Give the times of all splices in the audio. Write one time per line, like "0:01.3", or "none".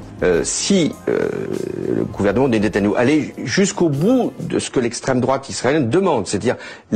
0:00.9